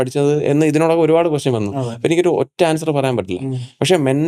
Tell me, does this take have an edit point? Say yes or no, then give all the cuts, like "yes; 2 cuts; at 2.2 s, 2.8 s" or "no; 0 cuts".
no; 0 cuts